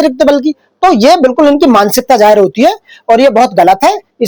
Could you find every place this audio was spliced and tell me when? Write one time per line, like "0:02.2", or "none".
none